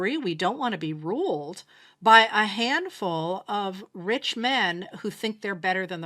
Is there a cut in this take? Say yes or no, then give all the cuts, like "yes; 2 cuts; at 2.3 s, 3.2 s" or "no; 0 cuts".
no; 0 cuts